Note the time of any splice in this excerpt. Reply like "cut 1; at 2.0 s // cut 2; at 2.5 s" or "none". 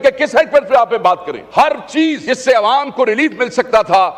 cut 1; at 1.4 s // cut 2; at 2.2 s

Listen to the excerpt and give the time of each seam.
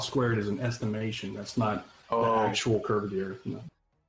cut 1; at 1.2 s

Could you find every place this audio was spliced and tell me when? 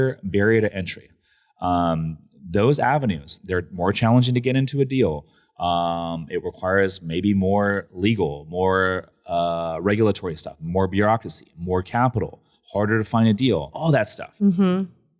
cut 1; at 13.7 s

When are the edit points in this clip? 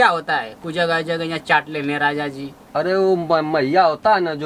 none

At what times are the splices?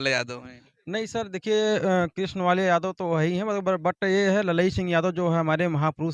none

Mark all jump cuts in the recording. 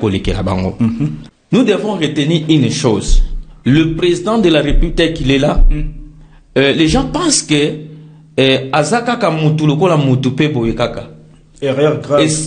cut 1; at 1.3 s

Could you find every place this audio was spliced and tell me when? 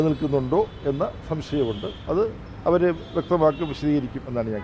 none

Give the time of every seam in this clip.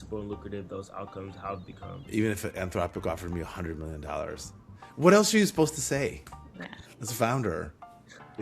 cut 1; at 1.9 s

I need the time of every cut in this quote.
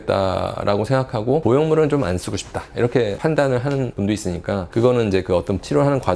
none

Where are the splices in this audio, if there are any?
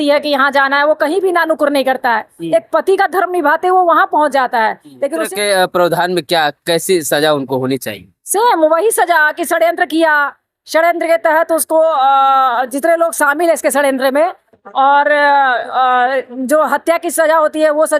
cut 1; at 5.3 s

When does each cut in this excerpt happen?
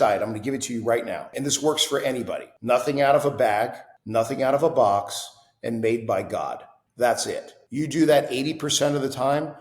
cut 1; at 1.3 s // cut 2; at 2.5 s

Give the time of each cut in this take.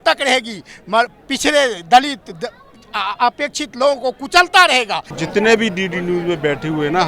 cut 1; at 5.2 s

